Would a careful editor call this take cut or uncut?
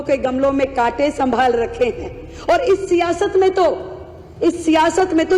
uncut